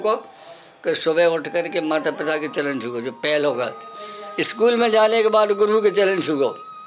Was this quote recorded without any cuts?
yes; 0 cuts

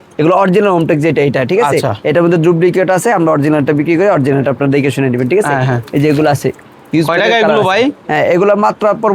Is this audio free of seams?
yes; 0 cuts

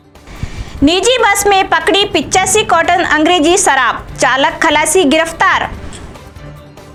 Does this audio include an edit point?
no; 0 cuts

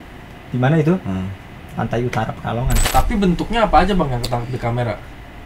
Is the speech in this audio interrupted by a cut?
yes; 1 cut; at 2.8 s

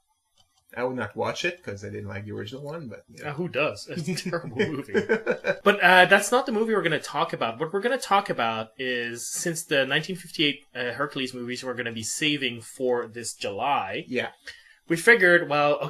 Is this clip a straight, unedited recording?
no; 1 cut; at 5.6 s

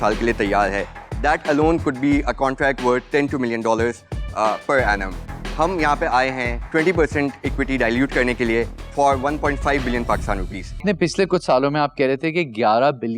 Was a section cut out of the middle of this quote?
yes; 1 cut; at 10.8 s

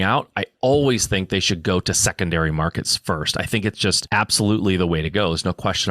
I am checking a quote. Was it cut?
yes; 1 cut; at 4.0 s

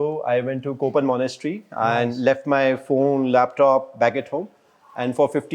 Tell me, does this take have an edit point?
no; 0 cuts

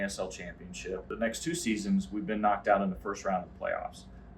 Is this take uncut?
no; 1 cut; at 1.0 s

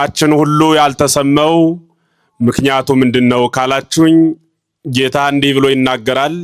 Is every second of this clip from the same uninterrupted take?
yes; 0 cuts

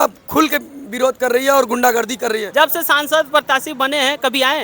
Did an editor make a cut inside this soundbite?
yes; 1 cut; at 2.4 s

